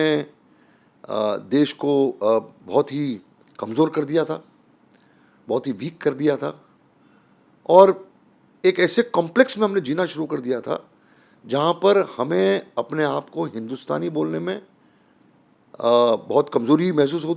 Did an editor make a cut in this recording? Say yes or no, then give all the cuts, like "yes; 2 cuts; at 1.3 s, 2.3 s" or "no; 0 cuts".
no; 0 cuts